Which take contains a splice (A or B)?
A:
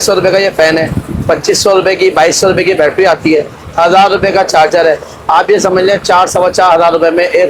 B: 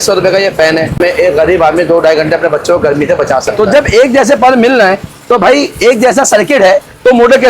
B